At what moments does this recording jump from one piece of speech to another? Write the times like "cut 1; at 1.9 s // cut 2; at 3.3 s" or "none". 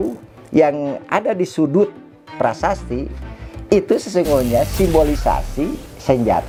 none